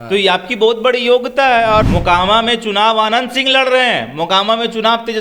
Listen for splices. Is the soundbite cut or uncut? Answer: cut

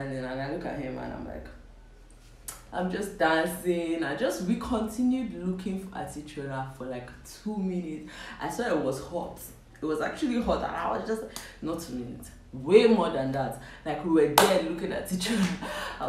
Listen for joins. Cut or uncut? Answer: uncut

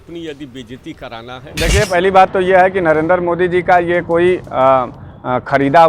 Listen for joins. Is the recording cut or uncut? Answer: cut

